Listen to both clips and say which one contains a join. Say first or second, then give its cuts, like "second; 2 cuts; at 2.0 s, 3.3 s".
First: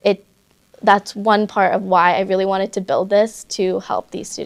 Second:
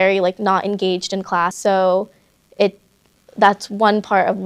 second; 1 cut; at 1.6 s